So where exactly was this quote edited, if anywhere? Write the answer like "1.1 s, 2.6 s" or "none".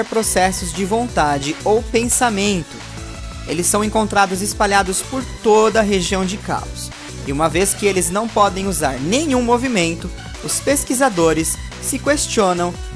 4.5 s